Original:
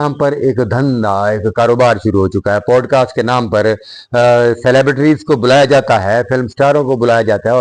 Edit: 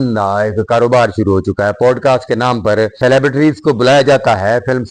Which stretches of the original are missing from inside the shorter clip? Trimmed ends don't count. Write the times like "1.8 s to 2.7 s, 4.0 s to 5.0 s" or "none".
3.8 s to 4.6 s